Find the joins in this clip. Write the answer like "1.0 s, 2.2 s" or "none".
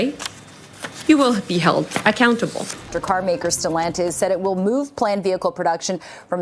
3.0 s